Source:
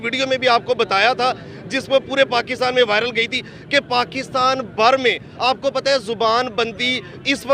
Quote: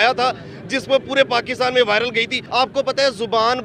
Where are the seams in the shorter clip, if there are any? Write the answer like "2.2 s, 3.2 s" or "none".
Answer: 2.4 s